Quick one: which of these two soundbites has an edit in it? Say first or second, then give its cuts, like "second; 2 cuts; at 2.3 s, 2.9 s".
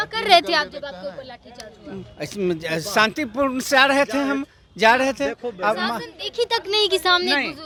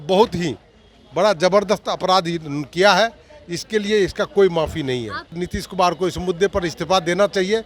second; 1 cut; at 5.4 s